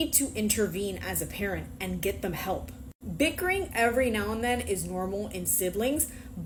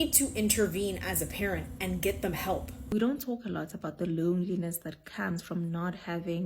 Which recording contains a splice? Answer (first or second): second